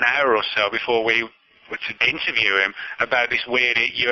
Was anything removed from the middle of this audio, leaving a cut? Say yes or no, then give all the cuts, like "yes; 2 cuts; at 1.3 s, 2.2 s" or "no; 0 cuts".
yes; 1 cut; at 1.9 s